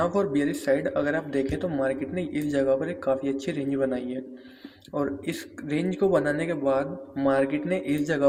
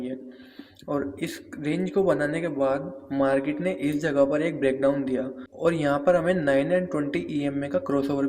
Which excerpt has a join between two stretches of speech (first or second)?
second